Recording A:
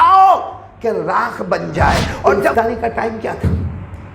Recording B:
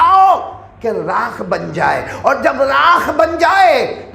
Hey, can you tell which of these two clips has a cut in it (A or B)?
A